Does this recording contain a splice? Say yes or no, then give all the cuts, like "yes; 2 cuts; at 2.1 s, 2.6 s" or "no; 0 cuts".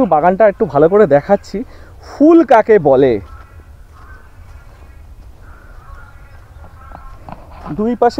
no; 0 cuts